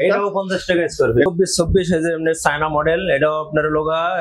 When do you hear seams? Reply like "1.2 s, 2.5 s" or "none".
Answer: 1.3 s